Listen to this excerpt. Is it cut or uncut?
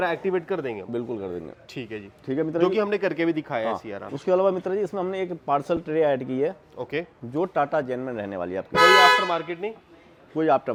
uncut